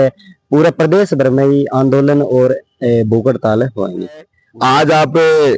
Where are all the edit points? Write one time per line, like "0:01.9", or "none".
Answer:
0:04.3